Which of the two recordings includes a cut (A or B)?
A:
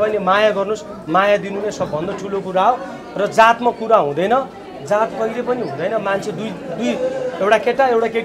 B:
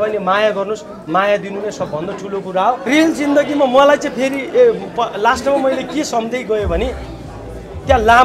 B